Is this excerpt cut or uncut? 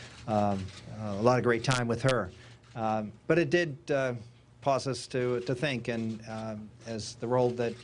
uncut